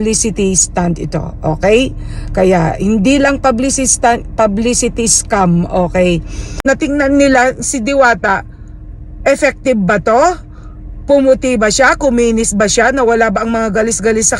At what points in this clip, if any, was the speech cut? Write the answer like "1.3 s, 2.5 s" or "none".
6.6 s